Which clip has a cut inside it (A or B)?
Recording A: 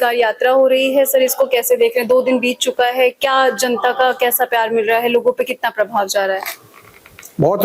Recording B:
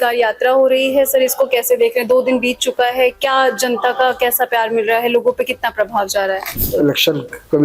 B